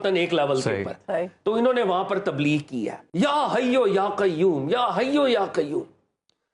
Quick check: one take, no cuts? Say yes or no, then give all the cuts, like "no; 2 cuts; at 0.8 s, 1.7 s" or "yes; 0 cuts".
no; 1 cut; at 3.0 s